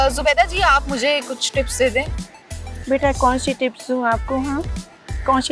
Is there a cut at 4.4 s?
no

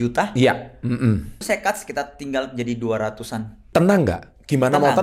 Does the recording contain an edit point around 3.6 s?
yes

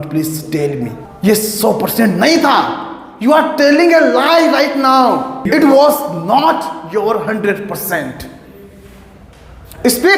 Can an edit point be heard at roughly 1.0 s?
yes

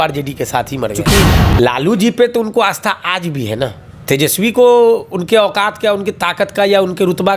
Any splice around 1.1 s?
yes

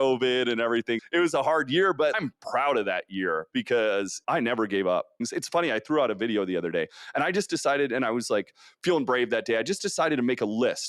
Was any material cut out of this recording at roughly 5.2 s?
yes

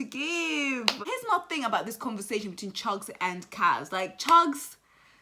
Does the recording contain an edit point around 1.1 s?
yes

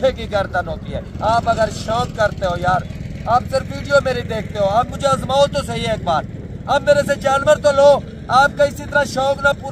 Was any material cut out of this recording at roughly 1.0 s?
yes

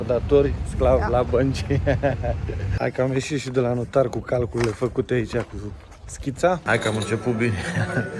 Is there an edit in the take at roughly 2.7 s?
yes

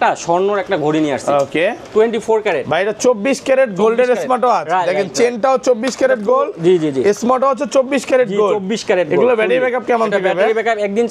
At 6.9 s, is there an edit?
no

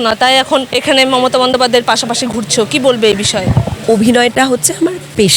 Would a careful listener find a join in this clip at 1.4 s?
no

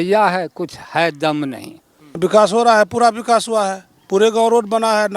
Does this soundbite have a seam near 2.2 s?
yes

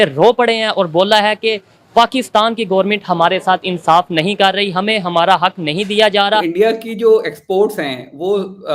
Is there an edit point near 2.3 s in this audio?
no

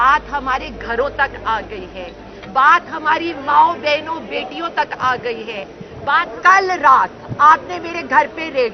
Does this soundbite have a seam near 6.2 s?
yes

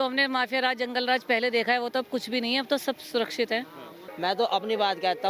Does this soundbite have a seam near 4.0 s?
yes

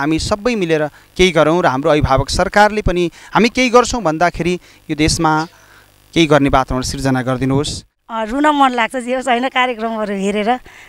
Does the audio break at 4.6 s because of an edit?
no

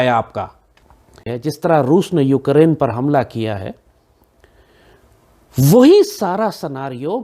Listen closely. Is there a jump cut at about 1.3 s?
yes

